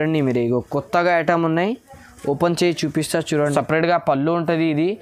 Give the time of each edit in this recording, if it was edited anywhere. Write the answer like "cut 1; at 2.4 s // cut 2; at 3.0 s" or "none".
cut 1; at 3.4 s

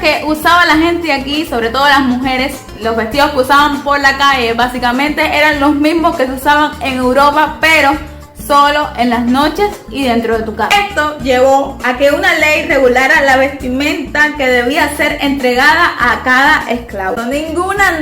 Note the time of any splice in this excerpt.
cut 1; at 10.7 s // cut 2; at 17.2 s

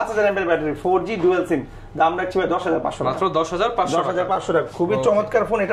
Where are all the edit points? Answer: none

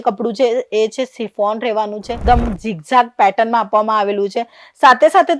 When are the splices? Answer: cut 1; at 2.1 s

